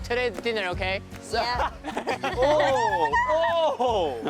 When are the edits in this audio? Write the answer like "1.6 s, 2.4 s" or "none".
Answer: 2.3 s